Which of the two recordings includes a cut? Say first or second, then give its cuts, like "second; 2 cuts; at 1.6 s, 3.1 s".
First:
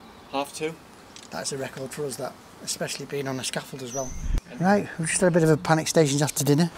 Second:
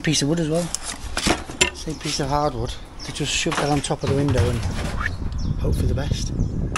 first; 1 cut; at 4.3 s